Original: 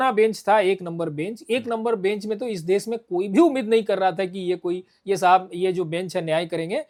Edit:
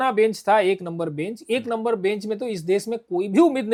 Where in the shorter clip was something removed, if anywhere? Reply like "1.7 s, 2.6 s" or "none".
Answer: none